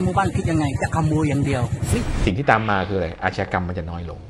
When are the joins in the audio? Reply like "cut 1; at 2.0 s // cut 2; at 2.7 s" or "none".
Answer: cut 1; at 2.1 s